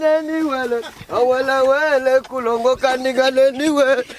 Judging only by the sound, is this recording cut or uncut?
uncut